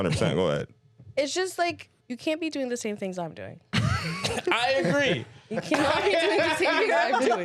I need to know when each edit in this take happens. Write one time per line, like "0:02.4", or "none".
0:01.9